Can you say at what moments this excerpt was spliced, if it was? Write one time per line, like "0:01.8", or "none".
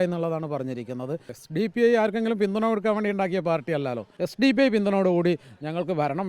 0:01.4
0:04.1